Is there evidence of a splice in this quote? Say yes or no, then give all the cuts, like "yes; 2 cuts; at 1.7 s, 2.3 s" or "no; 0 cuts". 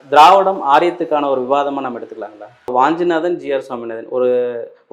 yes; 1 cut; at 2.7 s